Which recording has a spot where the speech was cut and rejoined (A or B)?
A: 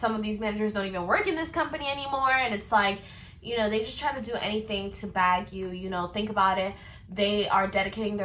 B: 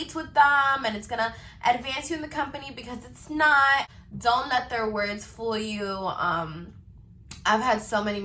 B